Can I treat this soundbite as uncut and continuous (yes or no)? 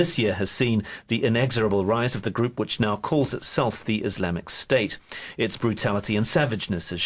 no